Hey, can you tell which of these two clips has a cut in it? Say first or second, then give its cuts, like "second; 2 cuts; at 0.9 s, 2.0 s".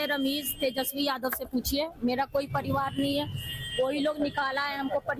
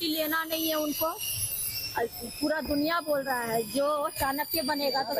second; 1 cut; at 1.2 s